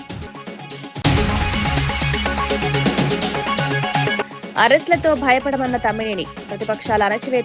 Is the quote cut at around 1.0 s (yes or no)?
no